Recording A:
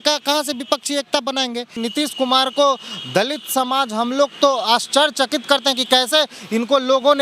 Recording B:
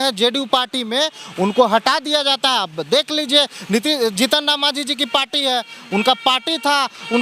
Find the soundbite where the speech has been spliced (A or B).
A